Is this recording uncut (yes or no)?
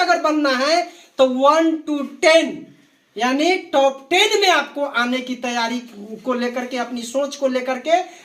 yes